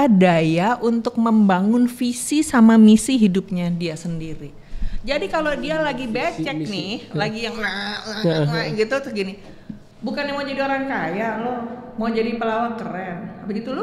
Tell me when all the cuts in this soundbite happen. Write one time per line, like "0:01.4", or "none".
none